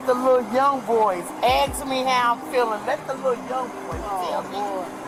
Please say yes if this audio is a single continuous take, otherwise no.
yes